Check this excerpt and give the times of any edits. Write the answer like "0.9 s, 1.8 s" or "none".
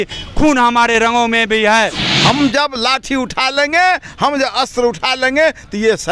2.1 s